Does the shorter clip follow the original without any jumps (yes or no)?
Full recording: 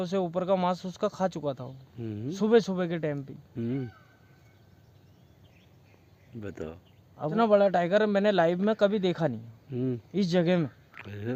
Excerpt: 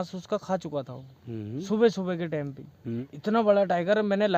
no